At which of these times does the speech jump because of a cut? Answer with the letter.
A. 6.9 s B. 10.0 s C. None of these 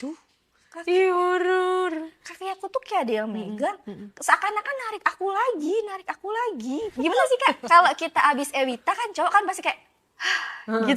A